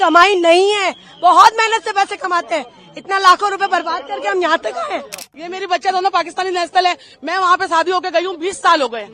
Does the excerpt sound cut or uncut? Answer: cut